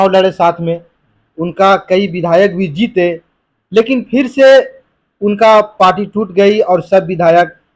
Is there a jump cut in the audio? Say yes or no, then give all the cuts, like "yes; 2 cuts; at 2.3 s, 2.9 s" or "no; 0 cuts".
no; 0 cuts